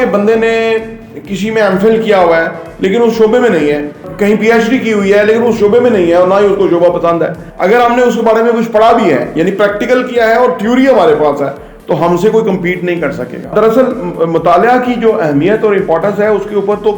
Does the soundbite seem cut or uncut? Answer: cut